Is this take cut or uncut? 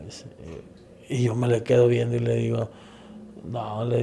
uncut